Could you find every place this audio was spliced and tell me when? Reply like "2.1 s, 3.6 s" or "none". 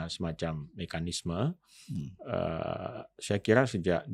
none